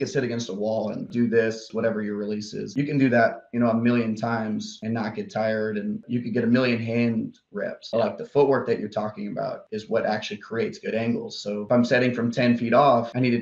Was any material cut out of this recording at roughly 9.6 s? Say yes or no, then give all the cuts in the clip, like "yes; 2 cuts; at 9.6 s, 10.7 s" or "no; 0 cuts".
yes; 4 cuts; at 1.1 s, 1.7 s, 6.0 s, 9.6 s